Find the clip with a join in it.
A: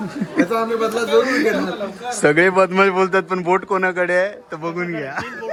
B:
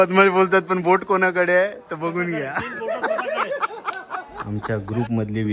B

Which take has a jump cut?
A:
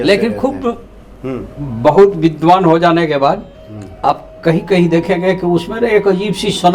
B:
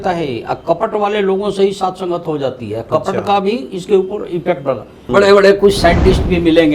B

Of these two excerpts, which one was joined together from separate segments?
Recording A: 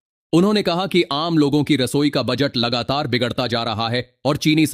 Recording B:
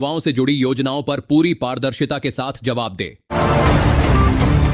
B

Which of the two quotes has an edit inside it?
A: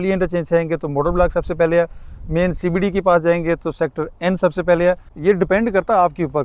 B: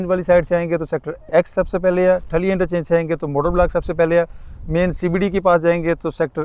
A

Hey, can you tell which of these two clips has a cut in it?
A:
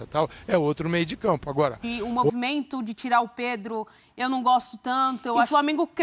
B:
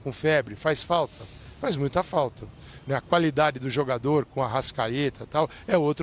A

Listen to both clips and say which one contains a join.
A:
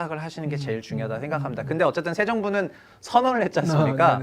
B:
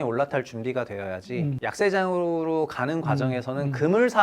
B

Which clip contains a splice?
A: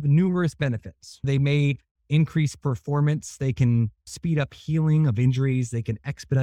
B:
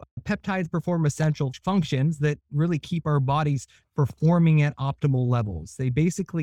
B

